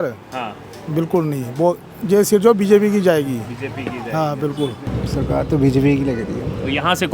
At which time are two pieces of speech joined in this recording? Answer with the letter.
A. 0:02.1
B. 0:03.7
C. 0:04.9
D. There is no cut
C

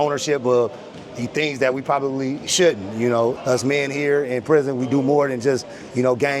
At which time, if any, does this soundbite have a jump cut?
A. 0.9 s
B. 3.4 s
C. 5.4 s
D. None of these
B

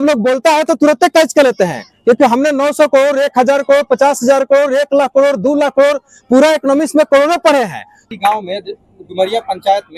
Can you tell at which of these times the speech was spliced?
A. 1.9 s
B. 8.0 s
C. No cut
B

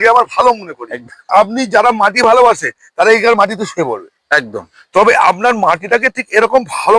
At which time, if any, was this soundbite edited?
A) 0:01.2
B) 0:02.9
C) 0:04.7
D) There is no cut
A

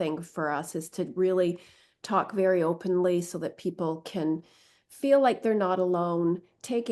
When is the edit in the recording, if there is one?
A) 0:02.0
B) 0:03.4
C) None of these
C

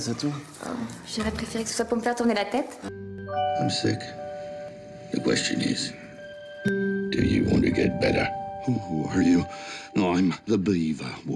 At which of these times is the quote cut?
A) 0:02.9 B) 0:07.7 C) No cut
A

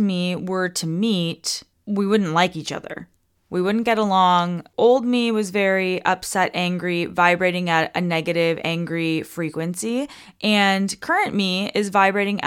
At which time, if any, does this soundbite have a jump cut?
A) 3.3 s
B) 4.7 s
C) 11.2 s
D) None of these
B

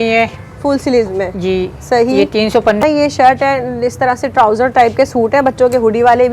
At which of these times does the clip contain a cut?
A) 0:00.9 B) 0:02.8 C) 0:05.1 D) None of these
B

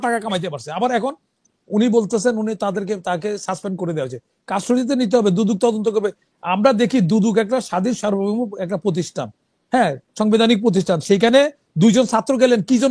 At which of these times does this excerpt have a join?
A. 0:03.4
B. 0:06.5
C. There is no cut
C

